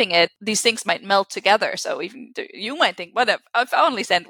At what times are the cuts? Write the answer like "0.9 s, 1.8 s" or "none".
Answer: none